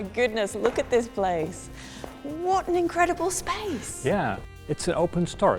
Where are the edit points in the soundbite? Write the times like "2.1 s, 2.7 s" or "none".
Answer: 4.4 s